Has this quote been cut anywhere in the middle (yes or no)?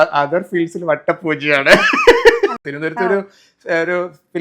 yes